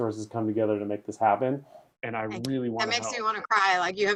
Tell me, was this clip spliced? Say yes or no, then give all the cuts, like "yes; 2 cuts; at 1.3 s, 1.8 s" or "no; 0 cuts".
no; 0 cuts